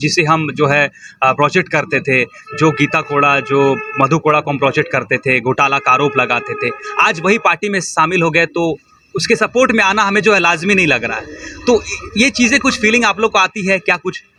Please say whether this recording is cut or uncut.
uncut